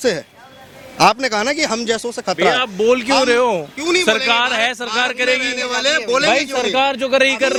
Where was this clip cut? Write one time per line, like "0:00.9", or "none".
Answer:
none